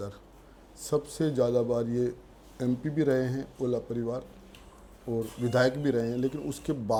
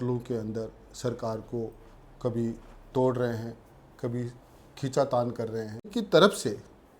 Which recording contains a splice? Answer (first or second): second